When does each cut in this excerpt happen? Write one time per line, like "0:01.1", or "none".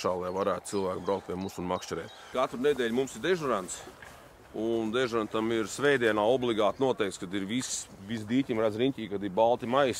0:02.2